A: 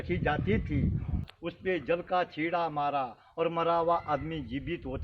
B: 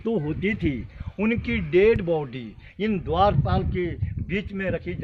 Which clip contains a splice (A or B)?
A